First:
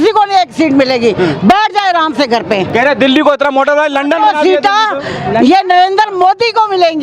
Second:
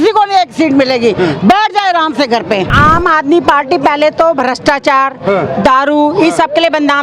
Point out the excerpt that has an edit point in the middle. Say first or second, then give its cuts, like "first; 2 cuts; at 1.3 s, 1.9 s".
second; 1 cut; at 2.7 s